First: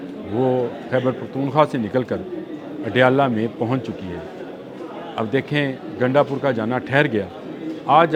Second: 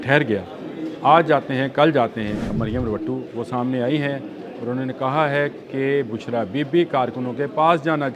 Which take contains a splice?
second; 1 cut; at 2.5 s

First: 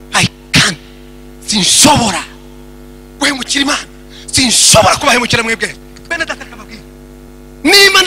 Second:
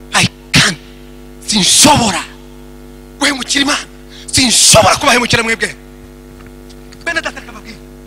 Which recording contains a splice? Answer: first; 2 cuts; at 5.8 s, 7.3 s

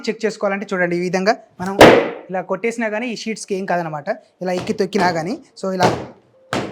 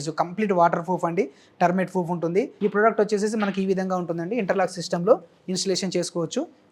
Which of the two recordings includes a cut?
second; 1 cut; at 2.5 s

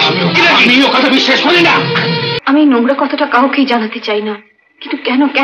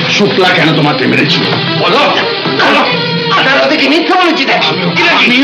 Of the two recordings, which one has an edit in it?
first; 1 cut; at 2.3 s

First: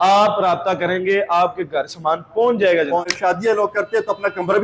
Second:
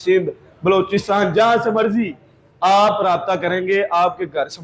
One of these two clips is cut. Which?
first; 1 cut; at 3.0 s

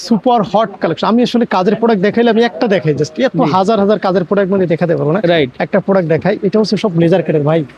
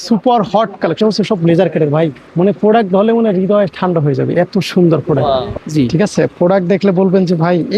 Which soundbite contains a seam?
second; 2 cuts; at 1.0 s, 5.6 s

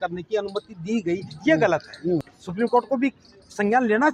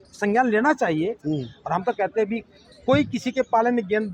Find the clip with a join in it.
first; 1 cut; at 2.4 s

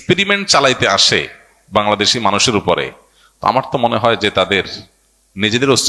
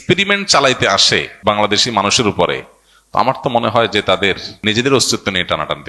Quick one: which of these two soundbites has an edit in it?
second; 2 cuts; at 1.3 s, 4.5 s

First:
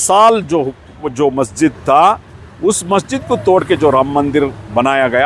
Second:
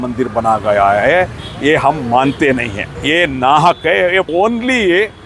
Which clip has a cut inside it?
second; 2 cuts; at 2.8 s, 4.3 s

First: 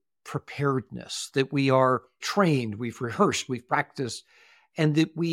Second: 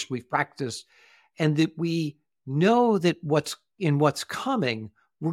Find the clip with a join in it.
first; 1 cut; at 2.2 s

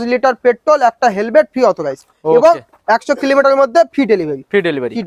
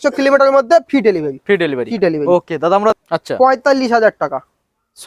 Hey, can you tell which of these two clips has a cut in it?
second; 1 cut; at 2.9 s

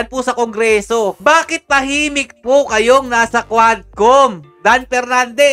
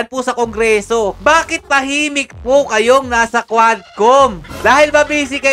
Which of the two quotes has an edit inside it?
second; 1 cut; at 4.5 s

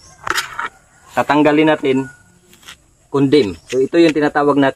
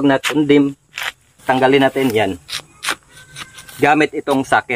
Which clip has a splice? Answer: second; 1 cut; at 1.4 s

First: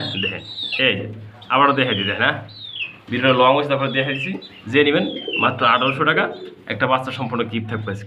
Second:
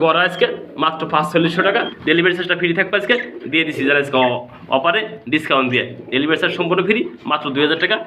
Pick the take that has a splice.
second; 1 cut; at 1.9 s

